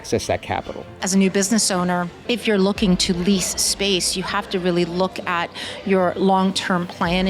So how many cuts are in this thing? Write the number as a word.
two